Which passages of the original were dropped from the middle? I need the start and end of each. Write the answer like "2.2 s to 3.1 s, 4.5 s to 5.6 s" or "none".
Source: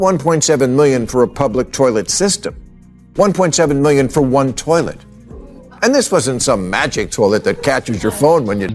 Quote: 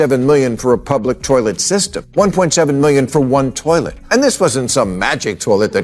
2.5 s to 3.0 s, 5.0 s to 5.7 s